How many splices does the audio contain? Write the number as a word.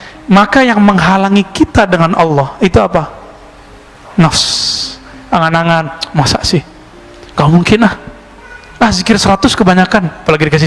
zero